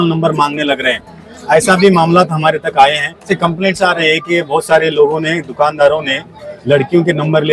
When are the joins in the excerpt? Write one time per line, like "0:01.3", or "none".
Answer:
0:03.3